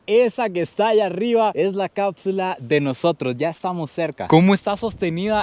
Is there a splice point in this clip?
yes; 1 cut; at 4.3 s

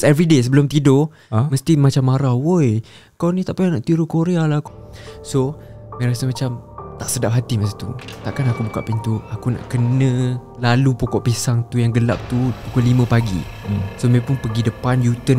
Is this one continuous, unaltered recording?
no; 1 cut; at 4.6 s

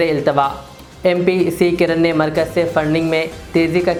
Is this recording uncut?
yes; 0 cuts

